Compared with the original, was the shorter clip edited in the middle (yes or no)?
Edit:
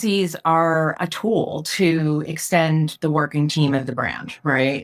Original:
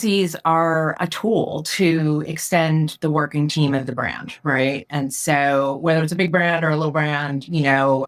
no